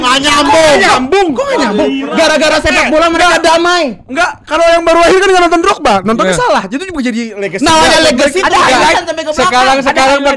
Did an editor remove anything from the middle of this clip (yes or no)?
no